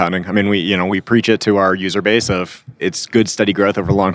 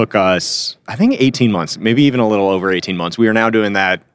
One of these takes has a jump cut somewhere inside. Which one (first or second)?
first